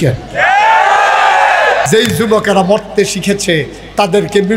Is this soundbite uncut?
no; 1 cut; at 1.9 s

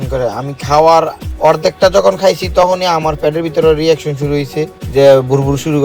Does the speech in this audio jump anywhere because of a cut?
no; 0 cuts

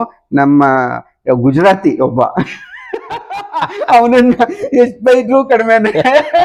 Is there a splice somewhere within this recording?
no; 0 cuts

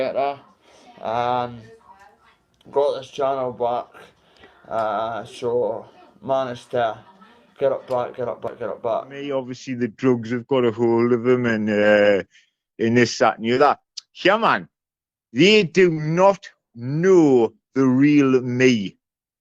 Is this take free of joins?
no; 1 cut; at 9.5 s

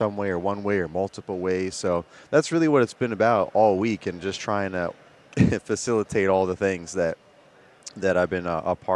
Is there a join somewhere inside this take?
no; 0 cuts

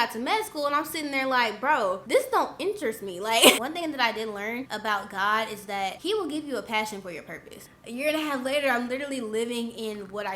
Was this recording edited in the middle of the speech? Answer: yes; 5 cuts; at 2.0 s, 3.6 s, 4.7 s, 6.0 s, 7.8 s

